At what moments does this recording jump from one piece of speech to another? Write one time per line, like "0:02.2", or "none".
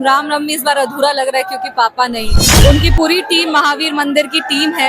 0:02.4